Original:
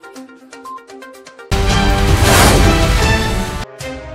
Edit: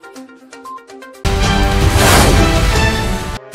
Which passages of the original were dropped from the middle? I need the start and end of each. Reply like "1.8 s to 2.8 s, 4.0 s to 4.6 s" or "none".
1.2 s to 1.5 s